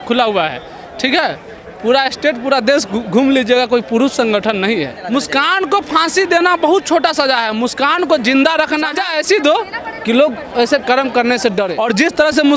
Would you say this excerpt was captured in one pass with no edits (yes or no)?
no